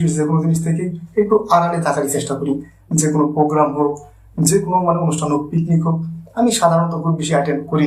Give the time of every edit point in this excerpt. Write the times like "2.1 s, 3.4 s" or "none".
none